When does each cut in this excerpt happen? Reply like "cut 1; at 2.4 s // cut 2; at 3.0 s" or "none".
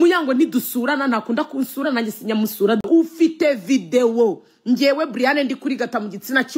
cut 1; at 2.8 s